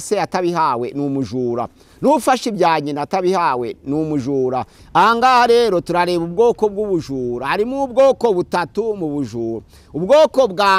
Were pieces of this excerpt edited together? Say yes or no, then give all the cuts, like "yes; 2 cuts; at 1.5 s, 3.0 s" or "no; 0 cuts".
yes; 1 cut; at 4.7 s